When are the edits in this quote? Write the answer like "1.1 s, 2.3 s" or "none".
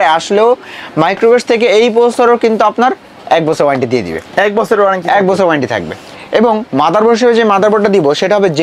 none